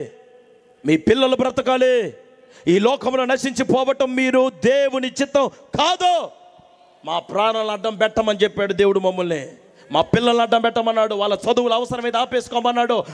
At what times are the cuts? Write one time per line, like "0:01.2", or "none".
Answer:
none